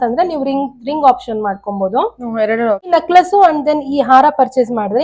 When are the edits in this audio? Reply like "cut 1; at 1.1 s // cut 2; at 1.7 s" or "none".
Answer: cut 1; at 2.9 s